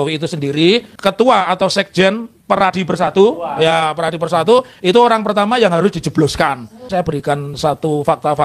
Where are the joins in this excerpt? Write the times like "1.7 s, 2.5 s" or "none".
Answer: 0.9 s, 6.9 s

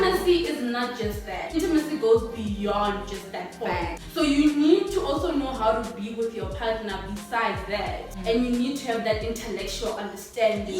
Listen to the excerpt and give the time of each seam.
1.5 s, 4.0 s, 8.1 s

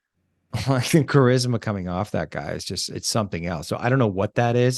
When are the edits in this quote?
none

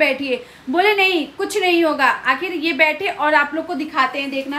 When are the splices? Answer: none

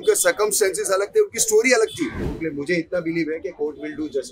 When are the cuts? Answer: 2.2 s

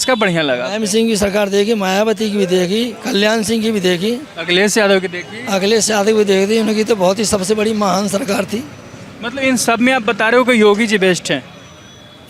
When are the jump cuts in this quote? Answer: none

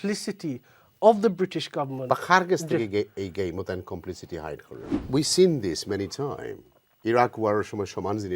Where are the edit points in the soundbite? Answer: 5.0 s

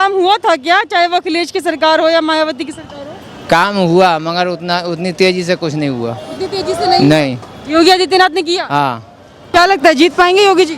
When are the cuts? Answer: 9.5 s

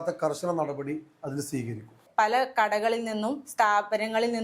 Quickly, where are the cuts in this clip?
2.1 s

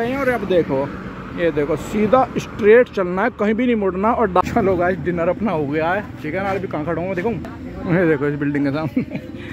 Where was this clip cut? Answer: 4.4 s

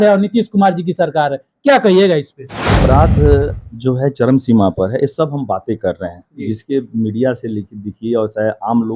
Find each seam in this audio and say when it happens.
2.7 s

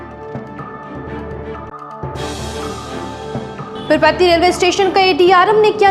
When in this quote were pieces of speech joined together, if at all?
3.5 s

